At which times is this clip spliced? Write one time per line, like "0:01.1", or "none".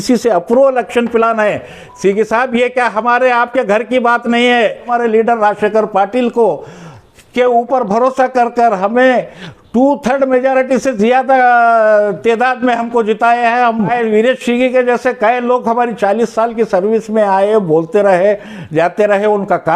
0:04.9
0:13.9